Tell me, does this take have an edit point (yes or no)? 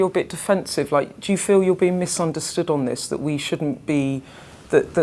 no